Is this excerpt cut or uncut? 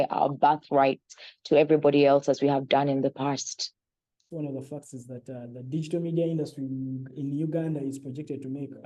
cut